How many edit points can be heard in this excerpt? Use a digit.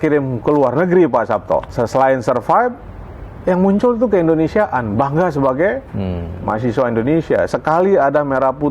1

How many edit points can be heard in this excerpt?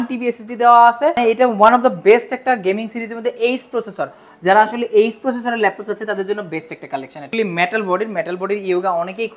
2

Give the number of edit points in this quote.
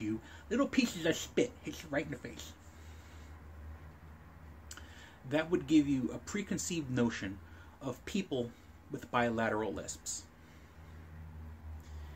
1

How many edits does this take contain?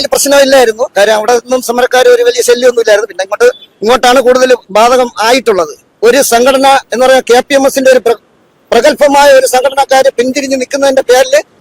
1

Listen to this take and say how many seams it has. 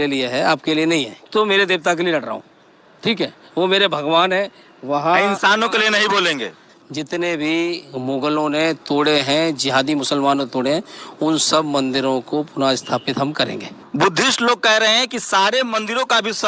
3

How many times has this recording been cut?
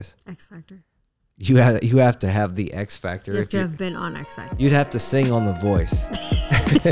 1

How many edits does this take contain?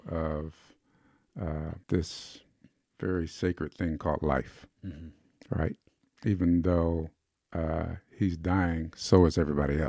1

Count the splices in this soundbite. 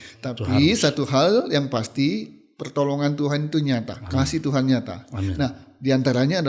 0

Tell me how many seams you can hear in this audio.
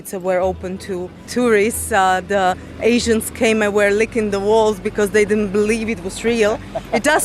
1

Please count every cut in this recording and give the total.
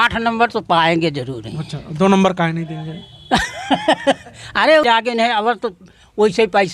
1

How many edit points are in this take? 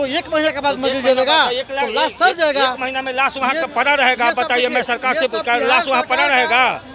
0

